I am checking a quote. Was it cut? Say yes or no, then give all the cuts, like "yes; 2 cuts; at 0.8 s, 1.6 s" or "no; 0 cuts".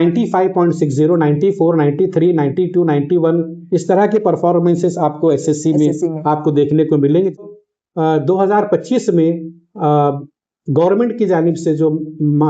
yes; 1 cut; at 7.4 s